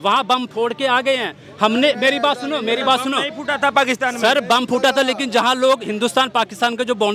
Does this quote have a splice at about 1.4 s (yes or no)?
no